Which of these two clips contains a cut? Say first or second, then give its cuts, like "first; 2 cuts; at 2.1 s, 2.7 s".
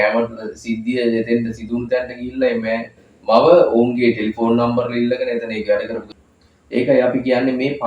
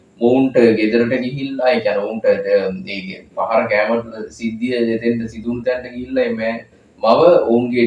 first; 1 cut; at 6.0 s